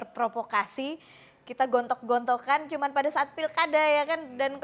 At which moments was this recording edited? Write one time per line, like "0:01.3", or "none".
none